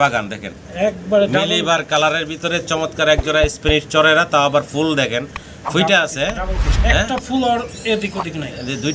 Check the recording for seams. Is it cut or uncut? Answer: uncut